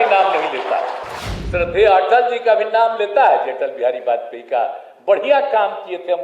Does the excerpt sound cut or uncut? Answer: cut